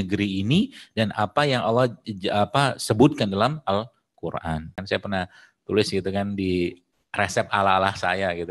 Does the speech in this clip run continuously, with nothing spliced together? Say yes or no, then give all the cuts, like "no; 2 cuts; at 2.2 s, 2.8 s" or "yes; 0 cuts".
no; 1 cut; at 4.8 s